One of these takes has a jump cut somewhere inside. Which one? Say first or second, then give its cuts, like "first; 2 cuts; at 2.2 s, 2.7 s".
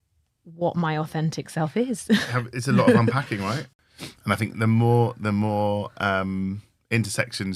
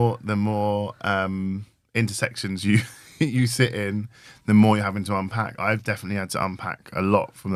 first; 1 cut; at 3.7 s